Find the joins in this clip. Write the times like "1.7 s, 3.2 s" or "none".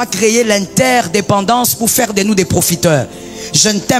none